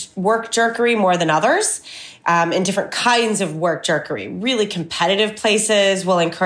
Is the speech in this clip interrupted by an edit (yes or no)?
no